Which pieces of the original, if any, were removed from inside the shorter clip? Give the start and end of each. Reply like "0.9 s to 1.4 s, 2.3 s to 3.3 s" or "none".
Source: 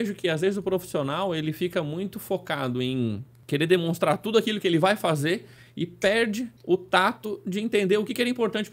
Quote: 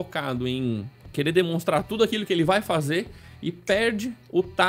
none